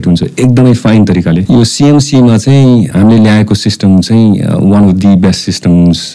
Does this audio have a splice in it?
yes; 2 cuts; at 1.4 s, 2.9 s

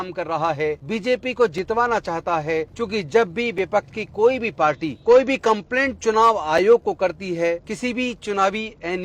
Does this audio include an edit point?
yes; 4 cuts; at 0.8 s, 2.7 s, 4.9 s, 7.7 s

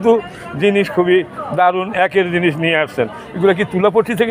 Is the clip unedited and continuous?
yes; 0 cuts

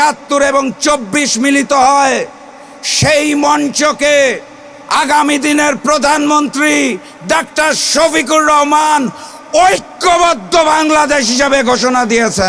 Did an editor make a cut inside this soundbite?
no; 0 cuts

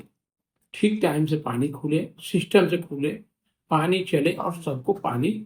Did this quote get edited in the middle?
no; 0 cuts

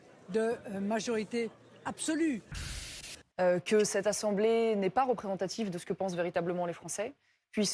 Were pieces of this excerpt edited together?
yes; 1 cut; at 2.7 s

